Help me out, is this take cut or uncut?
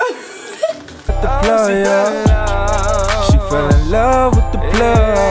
cut